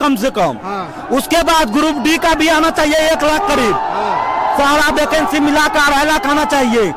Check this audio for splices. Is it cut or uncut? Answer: uncut